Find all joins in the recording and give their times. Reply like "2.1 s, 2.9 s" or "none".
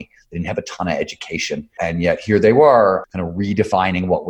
1.7 s, 3.0 s

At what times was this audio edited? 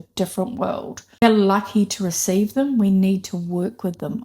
1.2 s

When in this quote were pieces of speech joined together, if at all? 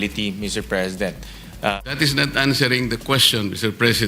1.8 s

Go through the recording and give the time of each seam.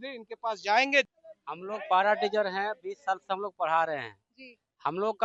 1.1 s

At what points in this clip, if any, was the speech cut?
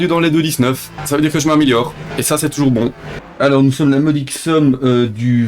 0.9 s, 2.0 s, 3.2 s

